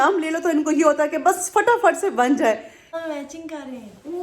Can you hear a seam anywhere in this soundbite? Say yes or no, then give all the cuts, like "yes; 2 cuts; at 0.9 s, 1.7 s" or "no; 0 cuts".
yes; 1 cut; at 3.0 s